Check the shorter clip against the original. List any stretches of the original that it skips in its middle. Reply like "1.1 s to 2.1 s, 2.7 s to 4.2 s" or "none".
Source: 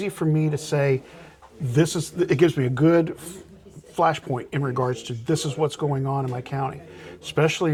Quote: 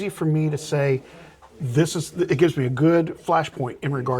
3.2 s to 3.9 s